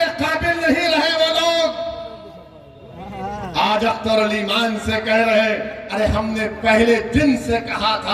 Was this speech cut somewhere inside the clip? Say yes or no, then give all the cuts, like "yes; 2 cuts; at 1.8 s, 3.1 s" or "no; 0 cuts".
no; 0 cuts